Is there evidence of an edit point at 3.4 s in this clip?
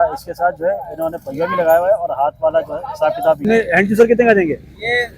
yes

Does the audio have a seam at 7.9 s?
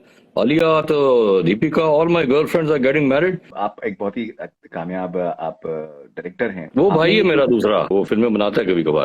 yes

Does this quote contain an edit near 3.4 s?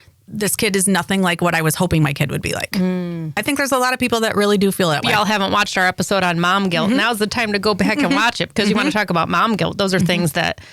yes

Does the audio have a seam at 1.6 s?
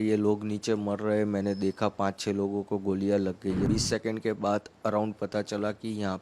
no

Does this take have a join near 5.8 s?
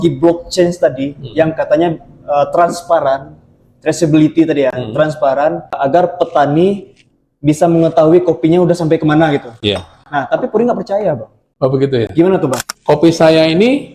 yes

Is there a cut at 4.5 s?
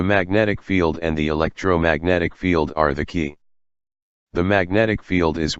no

